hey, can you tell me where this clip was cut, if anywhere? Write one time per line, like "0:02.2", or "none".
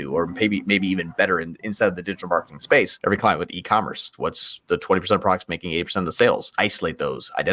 0:02.9
0:04.1
0:06.5